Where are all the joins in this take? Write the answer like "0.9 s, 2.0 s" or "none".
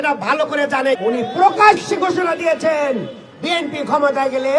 1.0 s